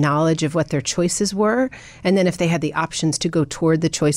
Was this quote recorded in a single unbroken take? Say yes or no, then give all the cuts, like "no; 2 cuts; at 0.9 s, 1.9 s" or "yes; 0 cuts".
yes; 0 cuts